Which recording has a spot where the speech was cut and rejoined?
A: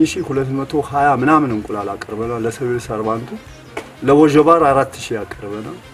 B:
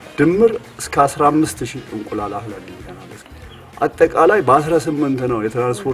B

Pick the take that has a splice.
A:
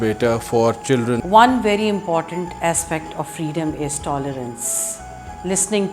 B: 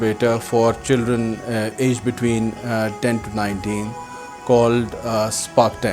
A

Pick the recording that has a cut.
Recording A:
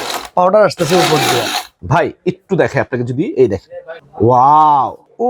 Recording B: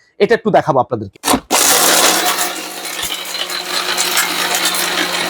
B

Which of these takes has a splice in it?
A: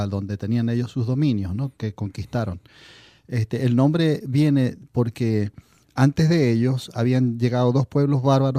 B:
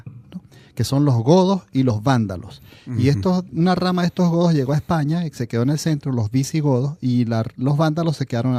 A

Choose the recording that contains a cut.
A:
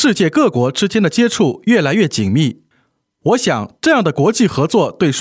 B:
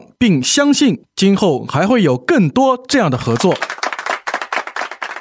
B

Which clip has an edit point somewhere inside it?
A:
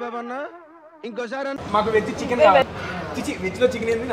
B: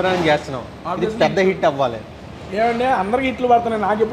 A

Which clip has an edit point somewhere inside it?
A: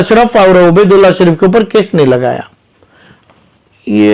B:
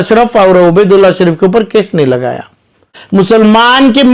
B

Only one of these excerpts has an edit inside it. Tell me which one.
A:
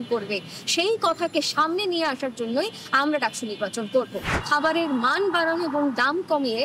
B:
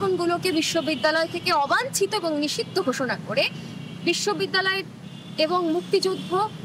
A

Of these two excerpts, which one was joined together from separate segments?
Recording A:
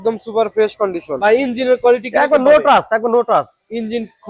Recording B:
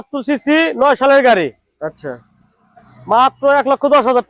A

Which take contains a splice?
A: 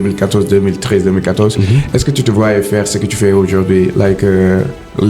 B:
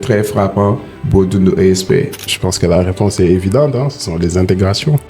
B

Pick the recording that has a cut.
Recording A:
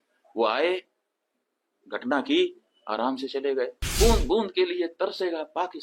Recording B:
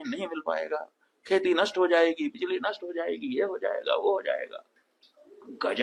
A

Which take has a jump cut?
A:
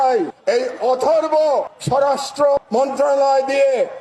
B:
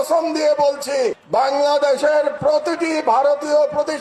A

